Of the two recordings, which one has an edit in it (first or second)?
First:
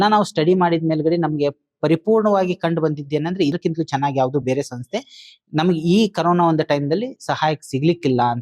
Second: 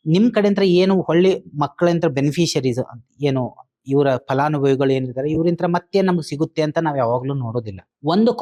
first